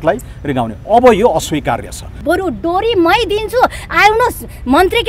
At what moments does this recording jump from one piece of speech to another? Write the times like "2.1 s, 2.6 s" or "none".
2.1 s